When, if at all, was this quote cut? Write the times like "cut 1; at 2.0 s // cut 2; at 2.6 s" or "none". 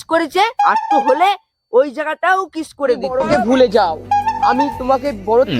cut 1; at 3.3 s